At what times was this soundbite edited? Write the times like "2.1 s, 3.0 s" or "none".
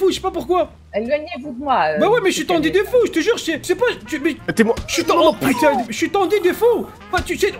3.6 s